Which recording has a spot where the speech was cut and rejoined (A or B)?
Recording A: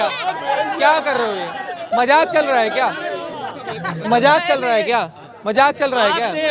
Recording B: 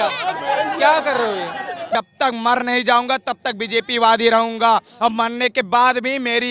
B